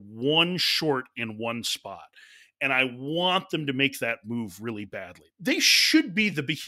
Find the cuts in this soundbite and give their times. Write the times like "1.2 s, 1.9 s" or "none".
5.2 s